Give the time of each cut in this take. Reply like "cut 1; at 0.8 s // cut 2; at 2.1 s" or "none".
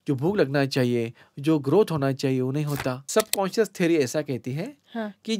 cut 1; at 2.9 s